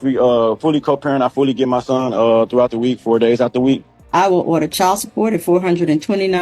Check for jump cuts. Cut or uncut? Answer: cut